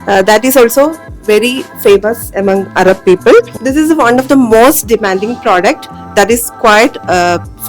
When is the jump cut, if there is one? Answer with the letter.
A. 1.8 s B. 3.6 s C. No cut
B